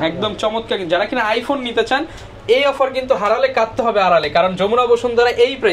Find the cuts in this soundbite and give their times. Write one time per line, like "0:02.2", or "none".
none

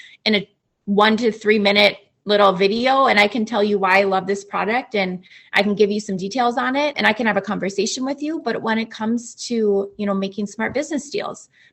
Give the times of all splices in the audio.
0:07.0

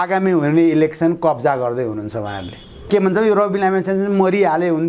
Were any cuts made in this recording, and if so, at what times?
0:02.9

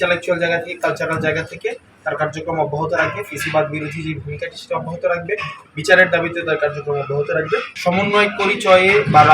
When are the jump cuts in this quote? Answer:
0:07.7

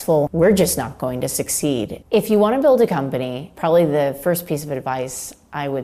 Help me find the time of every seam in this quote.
0:02.0

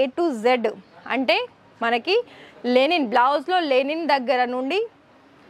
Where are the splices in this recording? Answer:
none

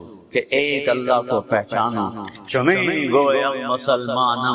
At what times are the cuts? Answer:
0:02.2

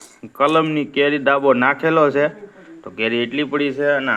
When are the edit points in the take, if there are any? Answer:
none

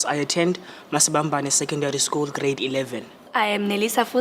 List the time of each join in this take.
0:01.2

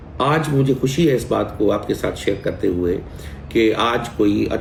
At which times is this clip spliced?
none

